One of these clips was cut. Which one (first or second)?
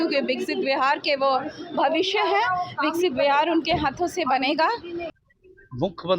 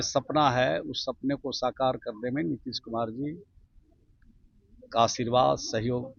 first